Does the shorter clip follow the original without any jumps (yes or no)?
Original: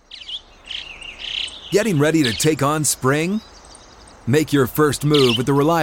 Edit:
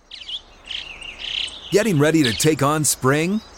yes